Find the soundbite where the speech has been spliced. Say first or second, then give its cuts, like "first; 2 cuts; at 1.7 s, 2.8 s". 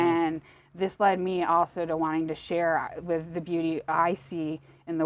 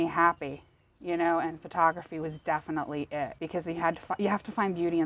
second; 1 cut; at 3.4 s